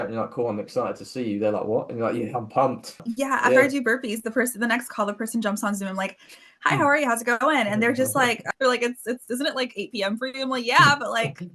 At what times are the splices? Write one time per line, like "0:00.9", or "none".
0:03.1
0:08.4